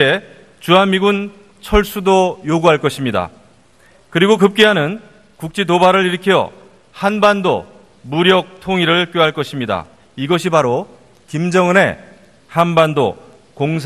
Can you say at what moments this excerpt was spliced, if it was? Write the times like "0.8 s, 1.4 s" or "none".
4.4 s

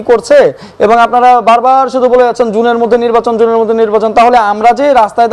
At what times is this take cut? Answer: none

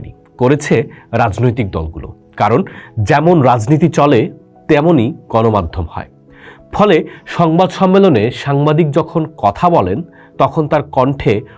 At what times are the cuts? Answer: none

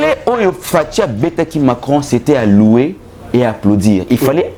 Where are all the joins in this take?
none

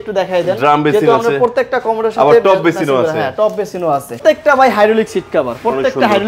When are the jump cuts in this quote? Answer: 4.2 s

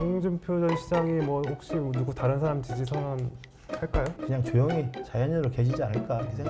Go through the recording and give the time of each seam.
4.2 s

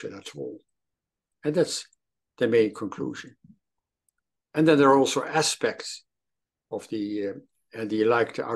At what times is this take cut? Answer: none

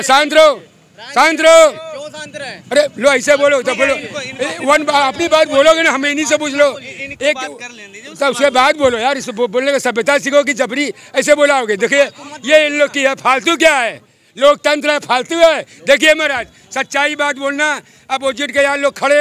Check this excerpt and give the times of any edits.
none

